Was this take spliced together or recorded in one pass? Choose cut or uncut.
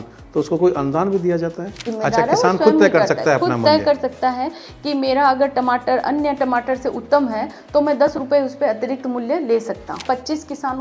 cut